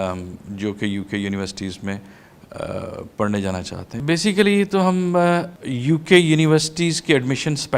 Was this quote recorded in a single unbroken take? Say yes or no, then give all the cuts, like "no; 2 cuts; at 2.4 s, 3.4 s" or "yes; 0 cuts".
no; 2 cuts; at 3.9 s, 5.6 s